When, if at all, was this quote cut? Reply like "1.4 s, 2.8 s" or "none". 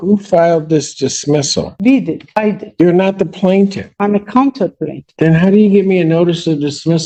none